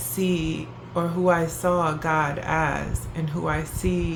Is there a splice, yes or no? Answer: no